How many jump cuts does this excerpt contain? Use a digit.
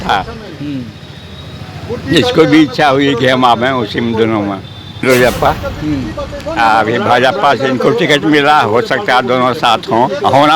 1